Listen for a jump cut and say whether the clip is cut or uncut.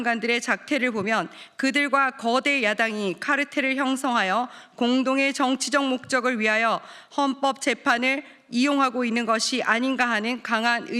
uncut